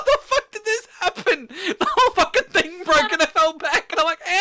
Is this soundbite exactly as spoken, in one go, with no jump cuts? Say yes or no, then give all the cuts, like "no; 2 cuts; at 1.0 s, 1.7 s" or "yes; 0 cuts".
yes; 0 cuts